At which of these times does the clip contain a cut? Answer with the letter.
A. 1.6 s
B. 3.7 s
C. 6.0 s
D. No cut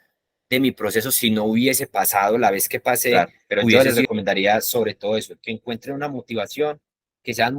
B